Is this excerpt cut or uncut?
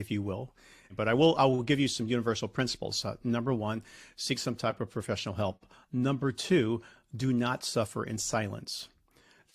cut